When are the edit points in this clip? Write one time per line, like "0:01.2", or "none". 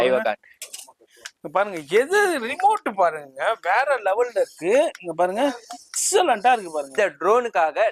0:06.9